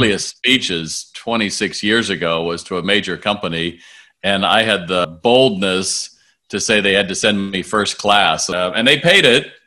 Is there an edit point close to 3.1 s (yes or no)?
no